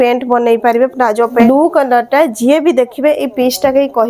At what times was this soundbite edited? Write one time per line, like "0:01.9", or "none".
0:01.3